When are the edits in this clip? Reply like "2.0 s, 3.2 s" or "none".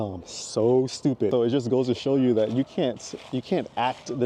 1.3 s